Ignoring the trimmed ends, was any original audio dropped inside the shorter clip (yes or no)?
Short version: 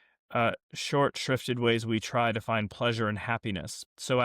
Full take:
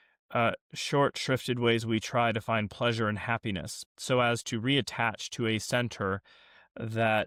no